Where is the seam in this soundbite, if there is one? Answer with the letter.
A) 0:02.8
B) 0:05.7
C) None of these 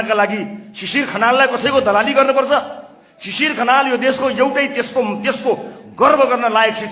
C